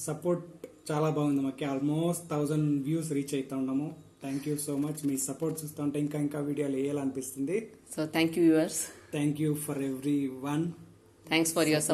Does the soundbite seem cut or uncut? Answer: uncut